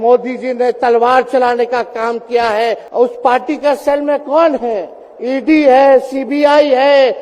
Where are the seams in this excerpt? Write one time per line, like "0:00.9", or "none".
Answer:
0:02.8

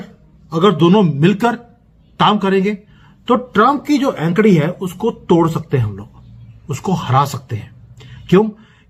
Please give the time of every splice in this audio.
none

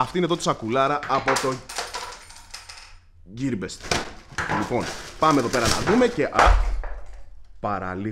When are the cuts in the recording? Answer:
none

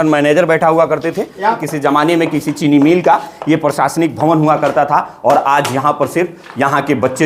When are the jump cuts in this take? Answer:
0:01.6

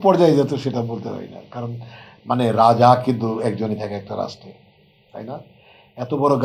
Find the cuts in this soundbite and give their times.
none

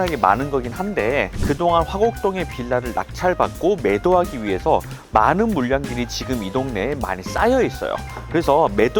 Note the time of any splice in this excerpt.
0:01.4

